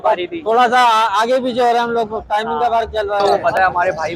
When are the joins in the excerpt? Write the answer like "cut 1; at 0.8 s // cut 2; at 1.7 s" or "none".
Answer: cut 1; at 3.2 s